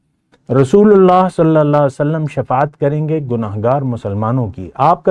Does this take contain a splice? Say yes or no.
no